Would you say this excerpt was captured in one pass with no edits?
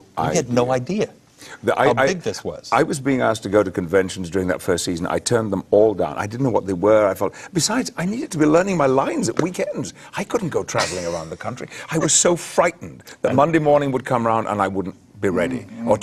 yes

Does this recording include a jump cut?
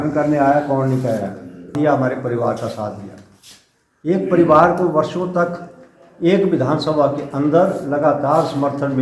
yes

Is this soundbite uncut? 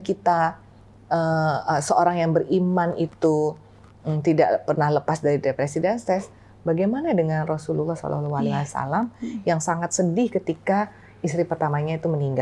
yes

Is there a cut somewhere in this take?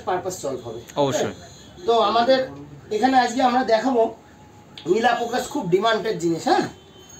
no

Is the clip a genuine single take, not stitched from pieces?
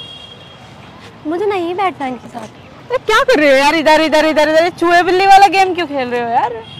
yes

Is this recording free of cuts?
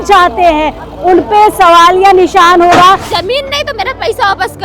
no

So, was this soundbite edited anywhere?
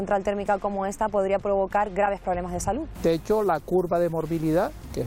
no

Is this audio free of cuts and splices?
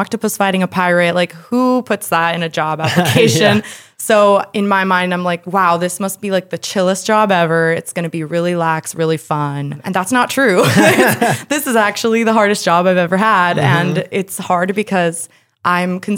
no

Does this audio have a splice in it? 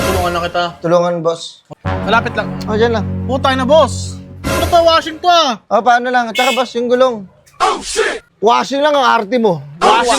yes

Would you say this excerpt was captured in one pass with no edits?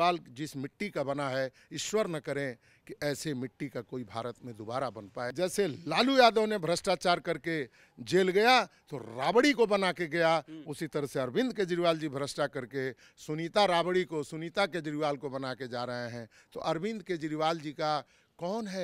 yes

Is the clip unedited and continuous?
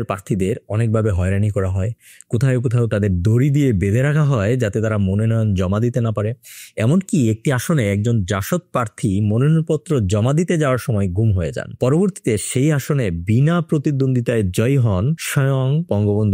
yes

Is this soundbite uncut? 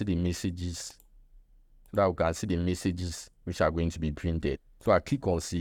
no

